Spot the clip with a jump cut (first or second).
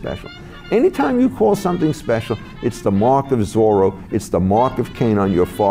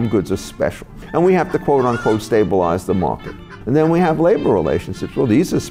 second